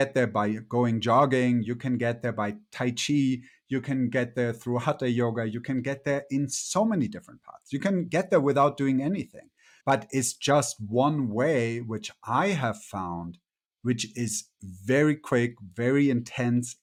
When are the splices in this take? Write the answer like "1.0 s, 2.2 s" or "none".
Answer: none

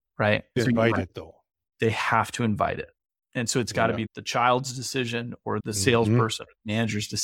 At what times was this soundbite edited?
none

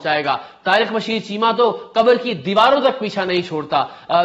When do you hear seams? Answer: none

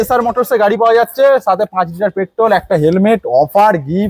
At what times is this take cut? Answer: none

